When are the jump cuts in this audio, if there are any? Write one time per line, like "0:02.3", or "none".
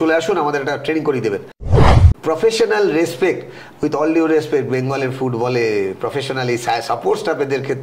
0:01.9